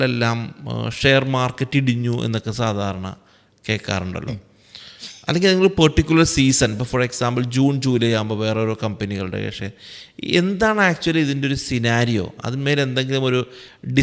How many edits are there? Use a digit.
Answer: 0